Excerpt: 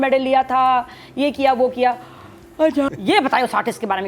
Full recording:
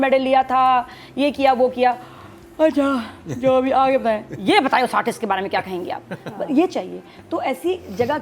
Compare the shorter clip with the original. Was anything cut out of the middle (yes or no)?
yes